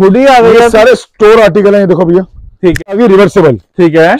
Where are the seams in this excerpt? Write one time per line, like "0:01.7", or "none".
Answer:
0:02.9